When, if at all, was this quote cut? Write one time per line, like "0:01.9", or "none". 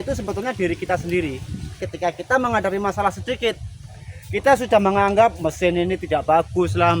0:01.9